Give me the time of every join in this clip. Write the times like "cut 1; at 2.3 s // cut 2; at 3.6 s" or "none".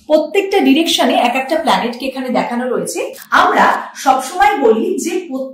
cut 1; at 3.2 s